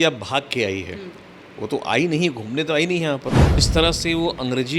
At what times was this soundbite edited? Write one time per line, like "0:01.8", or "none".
0:03.7